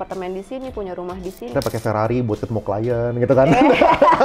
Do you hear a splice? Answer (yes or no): yes